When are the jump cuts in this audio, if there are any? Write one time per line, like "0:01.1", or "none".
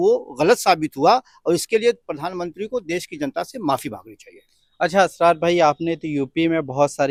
none